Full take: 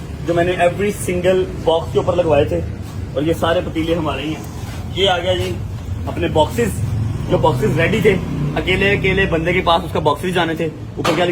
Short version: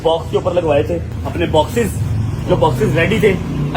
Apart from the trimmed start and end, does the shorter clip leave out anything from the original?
yes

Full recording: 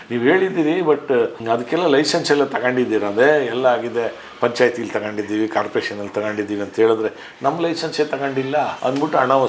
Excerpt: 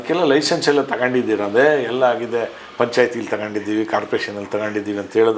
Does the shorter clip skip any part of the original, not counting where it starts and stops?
no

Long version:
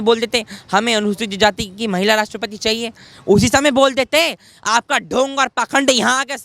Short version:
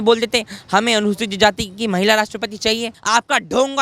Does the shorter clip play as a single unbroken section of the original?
no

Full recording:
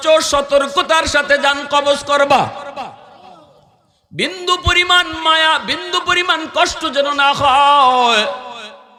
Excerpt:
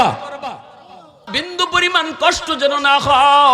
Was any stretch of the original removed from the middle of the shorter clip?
yes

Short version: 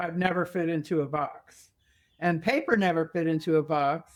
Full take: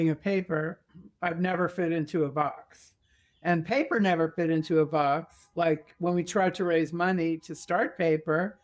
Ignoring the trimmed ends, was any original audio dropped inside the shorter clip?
no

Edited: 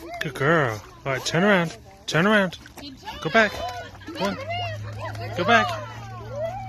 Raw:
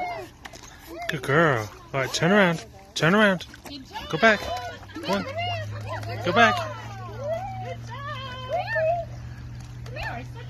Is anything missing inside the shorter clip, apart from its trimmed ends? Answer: no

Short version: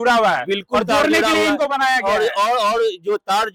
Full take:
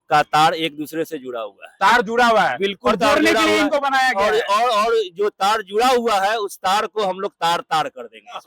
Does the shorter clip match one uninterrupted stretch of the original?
yes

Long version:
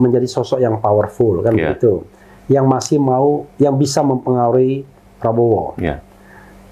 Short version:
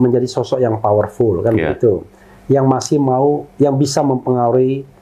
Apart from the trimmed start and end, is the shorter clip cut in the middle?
no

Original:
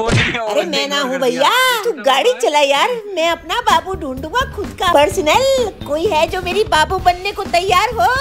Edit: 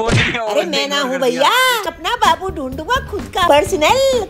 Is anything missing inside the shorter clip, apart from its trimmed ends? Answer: yes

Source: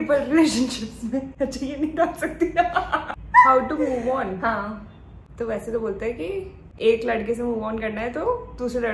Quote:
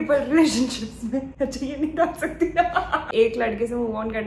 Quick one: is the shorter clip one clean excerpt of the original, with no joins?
no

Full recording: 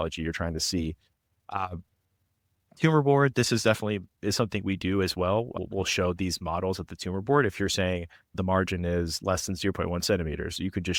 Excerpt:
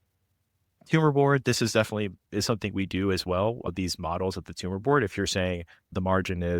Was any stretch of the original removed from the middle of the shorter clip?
yes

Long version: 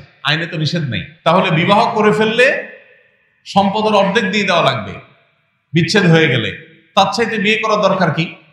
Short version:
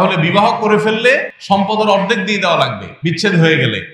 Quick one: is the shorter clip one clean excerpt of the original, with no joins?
no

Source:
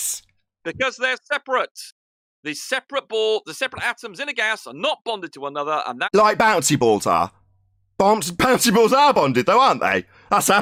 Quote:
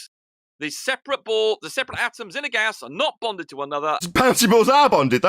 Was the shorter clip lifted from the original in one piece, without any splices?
no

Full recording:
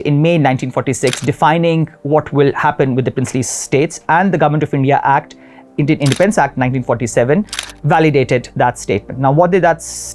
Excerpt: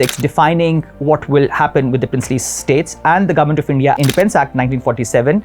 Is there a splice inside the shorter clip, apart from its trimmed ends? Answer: yes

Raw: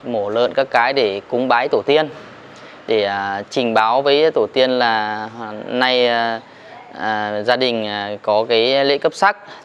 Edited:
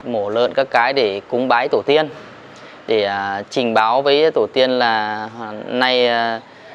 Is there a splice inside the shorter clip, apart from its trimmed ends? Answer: no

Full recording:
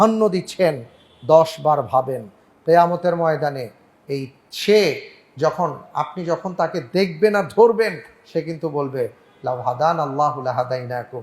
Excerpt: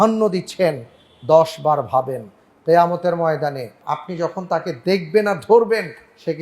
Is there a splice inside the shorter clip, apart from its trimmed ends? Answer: yes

